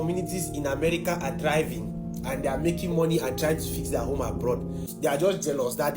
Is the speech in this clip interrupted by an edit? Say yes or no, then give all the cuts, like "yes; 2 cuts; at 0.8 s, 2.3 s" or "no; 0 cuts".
yes; 1 cut; at 4.9 s